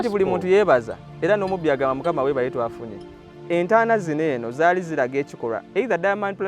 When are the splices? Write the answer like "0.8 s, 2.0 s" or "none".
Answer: 3.3 s